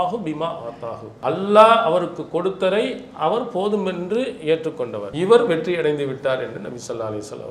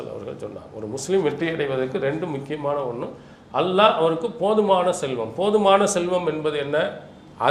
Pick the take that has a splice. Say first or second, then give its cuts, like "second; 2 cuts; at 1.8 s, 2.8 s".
first; 2 cuts; at 1.1 s, 5.1 s